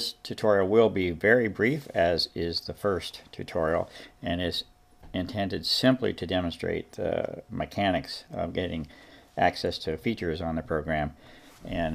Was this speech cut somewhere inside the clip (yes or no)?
no